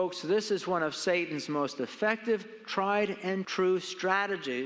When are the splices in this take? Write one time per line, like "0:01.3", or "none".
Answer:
0:03.5